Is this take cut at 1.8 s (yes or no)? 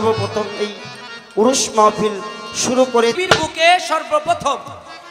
no